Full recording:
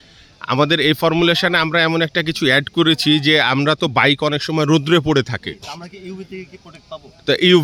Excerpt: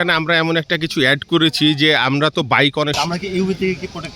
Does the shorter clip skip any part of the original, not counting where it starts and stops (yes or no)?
yes